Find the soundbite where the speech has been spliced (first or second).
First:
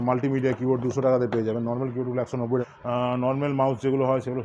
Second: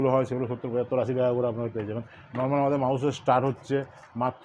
first